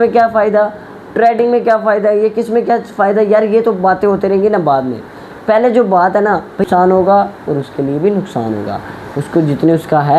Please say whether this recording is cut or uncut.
cut